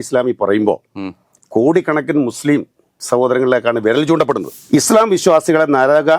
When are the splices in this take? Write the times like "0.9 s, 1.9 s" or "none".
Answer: 4.5 s